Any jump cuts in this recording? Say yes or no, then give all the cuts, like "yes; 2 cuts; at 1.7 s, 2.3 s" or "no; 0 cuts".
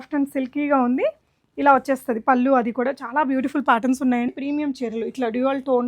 yes; 1 cut; at 4.3 s